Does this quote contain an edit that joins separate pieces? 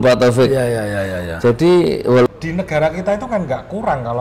yes; 1 cut; at 2.3 s

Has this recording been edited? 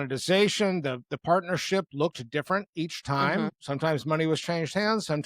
yes; 1 cut; at 3.6 s

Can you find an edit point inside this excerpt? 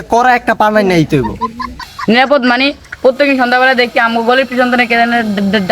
yes; 1 cut; at 1.9 s

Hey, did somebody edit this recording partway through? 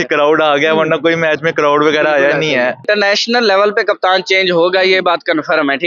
yes; 1 cut; at 2.9 s

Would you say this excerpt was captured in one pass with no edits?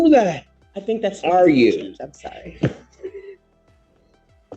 yes; 0 cuts

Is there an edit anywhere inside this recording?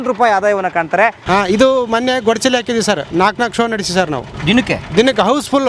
yes; 3 cuts; at 1.2 s, 3.1 s, 4.7 s

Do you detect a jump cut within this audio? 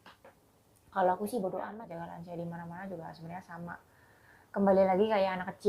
yes; 1 cut; at 1.7 s

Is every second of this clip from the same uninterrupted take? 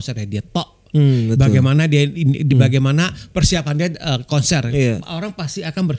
yes; 0 cuts

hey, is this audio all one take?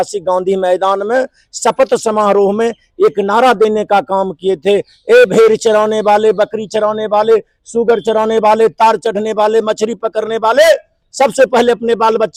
yes; 0 cuts

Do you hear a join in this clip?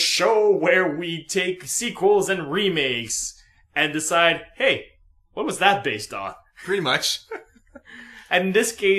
no; 0 cuts

